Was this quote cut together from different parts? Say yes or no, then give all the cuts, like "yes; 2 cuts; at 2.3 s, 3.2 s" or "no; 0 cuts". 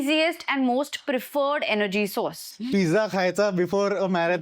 yes; 1 cut; at 2.5 s